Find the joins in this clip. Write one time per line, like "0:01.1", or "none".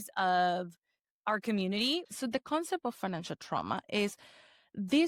0:02.0